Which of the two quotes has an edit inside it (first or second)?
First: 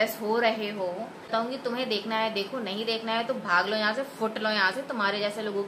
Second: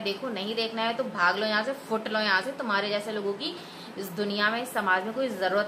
first